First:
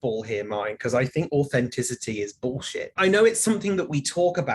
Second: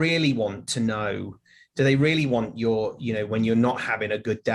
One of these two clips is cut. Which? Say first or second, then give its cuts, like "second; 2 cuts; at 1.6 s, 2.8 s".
first; 1 cut; at 2.9 s